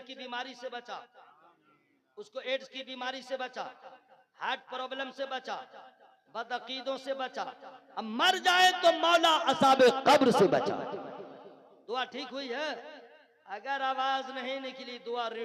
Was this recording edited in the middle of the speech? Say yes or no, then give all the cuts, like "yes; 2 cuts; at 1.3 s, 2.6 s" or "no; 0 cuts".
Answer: no; 0 cuts